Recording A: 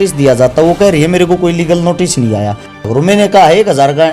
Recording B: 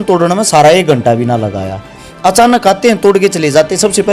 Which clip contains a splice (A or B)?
A